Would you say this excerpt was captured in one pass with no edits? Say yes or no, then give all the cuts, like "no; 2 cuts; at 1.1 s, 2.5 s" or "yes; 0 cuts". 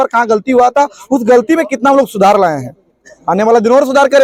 yes; 0 cuts